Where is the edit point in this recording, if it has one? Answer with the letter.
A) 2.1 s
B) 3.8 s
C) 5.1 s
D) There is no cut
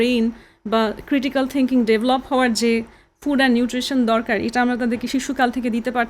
C